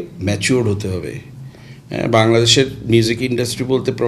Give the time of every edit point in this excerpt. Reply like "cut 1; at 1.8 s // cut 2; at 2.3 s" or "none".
cut 1; at 1.5 s